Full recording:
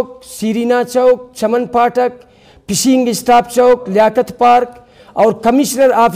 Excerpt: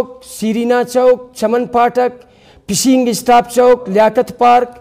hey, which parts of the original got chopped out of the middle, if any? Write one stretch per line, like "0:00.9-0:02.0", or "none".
none

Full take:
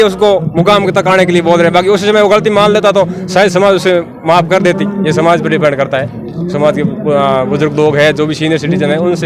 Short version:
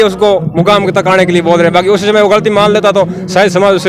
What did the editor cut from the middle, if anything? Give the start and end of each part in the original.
none

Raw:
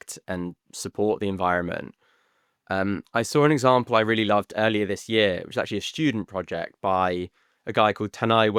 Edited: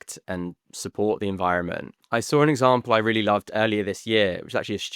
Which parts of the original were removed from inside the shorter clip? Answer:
0:02.0-0:03.0

